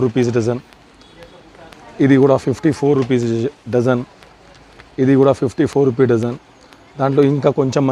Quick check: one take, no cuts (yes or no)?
yes